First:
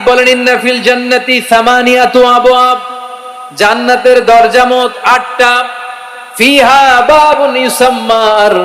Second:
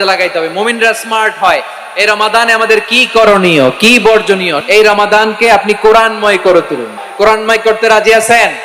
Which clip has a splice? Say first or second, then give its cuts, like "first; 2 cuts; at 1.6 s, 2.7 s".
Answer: second; 2 cuts; at 4.6 s, 6.9 s